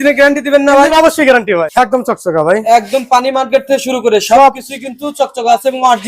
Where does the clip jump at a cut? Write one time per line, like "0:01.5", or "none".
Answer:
0:01.7